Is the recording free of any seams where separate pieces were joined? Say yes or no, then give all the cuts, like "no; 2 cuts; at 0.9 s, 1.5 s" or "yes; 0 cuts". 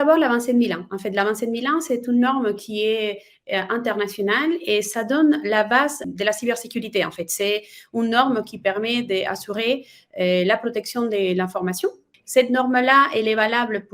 yes; 0 cuts